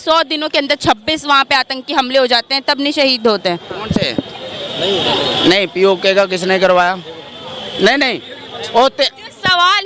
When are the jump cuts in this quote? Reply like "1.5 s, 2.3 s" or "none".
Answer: none